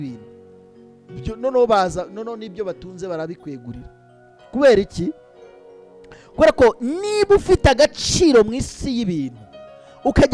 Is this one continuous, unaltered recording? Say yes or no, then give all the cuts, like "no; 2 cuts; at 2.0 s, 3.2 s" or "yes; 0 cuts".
yes; 0 cuts